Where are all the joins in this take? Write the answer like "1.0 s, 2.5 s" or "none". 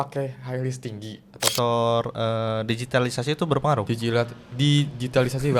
1.4 s

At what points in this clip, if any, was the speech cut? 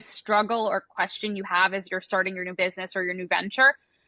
none

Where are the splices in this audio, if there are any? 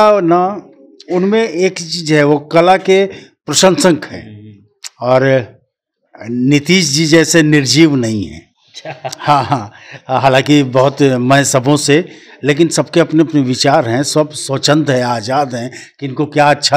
none

